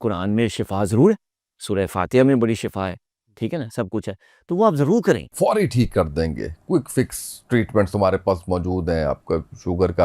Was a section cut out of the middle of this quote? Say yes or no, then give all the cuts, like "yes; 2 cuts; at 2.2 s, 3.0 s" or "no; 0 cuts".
yes; 1 cut; at 5.3 s